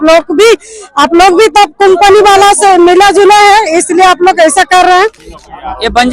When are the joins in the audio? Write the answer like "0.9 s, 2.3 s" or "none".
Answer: 5.2 s